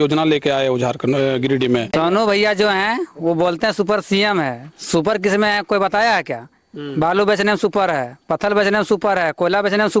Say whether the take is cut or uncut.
cut